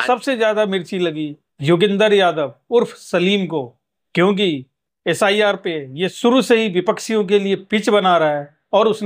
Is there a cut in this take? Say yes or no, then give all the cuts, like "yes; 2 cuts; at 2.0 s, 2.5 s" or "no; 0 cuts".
no; 0 cuts